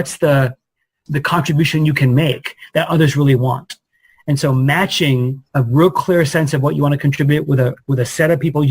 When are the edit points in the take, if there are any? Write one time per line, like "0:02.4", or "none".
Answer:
0:01.0